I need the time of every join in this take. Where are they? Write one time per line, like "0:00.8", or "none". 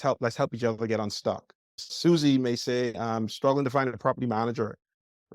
0:01.8
0:02.9